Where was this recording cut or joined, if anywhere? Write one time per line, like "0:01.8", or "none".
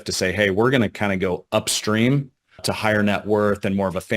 0:02.7